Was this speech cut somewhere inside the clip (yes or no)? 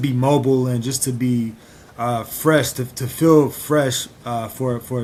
no